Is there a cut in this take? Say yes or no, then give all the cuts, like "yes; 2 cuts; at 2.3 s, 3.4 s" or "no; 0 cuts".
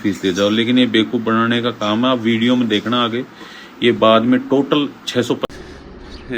yes; 1 cut; at 5.5 s